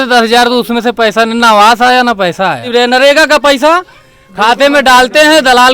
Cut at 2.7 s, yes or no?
yes